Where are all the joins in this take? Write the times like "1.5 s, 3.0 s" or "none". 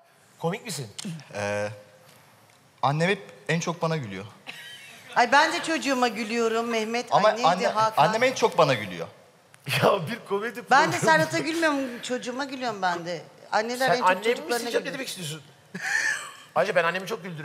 9.2 s